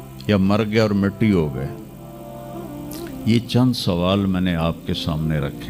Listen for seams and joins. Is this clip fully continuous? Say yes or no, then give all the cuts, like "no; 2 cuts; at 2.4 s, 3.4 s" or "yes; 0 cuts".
yes; 0 cuts